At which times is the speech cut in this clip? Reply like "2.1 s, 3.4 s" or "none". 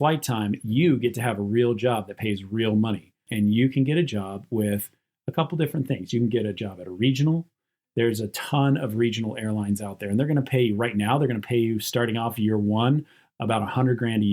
3.2 s, 7.7 s